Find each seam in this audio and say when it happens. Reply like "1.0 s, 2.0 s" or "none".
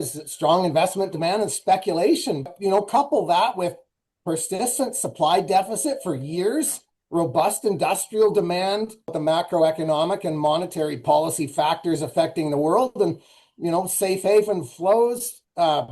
2.5 s, 9.2 s